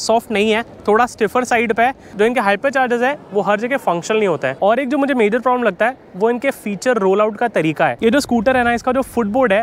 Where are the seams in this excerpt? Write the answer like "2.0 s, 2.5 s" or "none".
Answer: 2.1 s, 4.5 s, 8.0 s